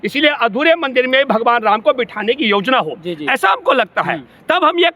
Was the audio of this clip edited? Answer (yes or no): no